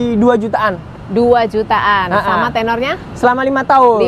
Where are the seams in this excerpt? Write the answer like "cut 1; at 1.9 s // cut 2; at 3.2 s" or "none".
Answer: none